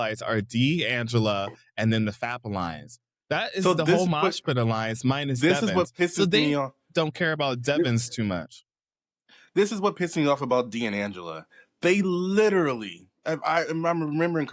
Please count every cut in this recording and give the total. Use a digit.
0